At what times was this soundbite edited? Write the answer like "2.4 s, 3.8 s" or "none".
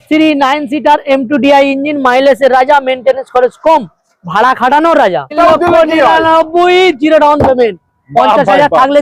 5.4 s